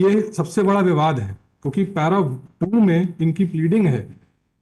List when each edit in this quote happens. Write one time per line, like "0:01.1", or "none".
none